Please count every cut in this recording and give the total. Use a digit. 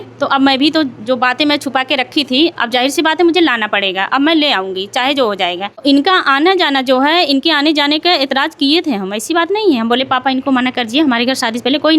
1